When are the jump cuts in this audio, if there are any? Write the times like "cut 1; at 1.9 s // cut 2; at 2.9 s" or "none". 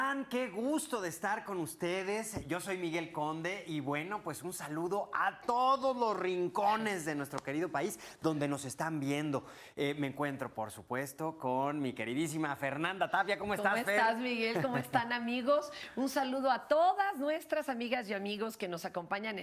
none